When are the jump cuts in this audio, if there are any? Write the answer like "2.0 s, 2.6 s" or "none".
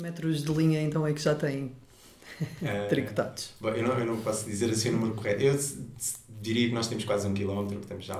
none